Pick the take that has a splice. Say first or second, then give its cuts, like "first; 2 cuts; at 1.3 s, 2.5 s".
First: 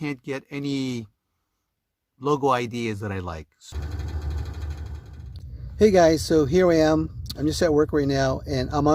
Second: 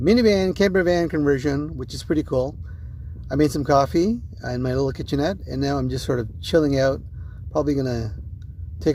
first; 1 cut; at 3.6 s